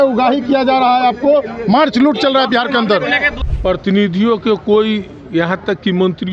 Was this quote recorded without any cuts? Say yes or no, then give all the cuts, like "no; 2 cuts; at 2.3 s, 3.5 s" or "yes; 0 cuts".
no; 1 cut; at 3.3 s